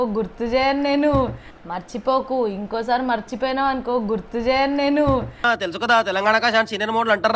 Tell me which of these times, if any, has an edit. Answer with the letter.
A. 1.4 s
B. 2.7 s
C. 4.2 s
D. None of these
D